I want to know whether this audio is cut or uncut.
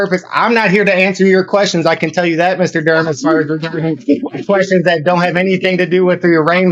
uncut